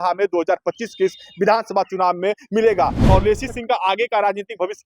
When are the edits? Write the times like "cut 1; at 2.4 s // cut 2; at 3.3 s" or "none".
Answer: cut 1; at 3.0 s